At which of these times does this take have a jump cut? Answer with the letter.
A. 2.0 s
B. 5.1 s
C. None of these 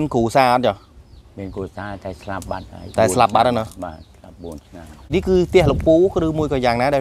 B